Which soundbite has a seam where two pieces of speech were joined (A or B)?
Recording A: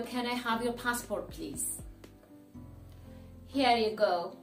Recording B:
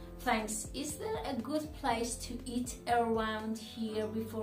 A